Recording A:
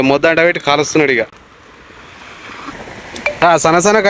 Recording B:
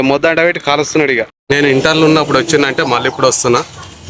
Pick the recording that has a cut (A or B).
B